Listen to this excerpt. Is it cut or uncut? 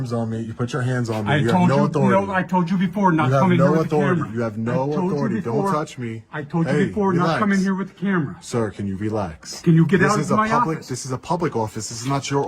uncut